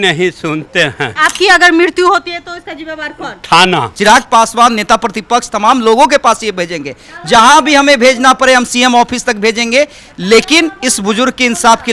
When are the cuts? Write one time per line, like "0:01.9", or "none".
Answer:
0:01.1
0:03.9